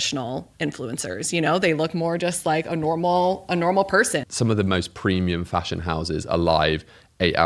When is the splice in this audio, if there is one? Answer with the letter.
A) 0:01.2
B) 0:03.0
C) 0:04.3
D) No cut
C